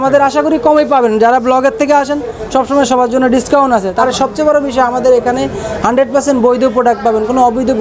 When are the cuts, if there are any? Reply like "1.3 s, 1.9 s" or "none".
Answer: 4.1 s